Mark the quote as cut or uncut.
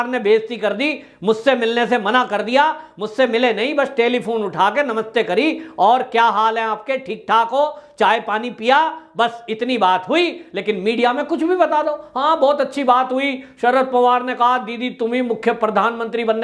uncut